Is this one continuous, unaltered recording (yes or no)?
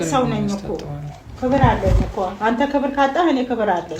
yes